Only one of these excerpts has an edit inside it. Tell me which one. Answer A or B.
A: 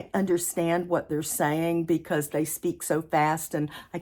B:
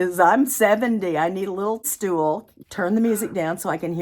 B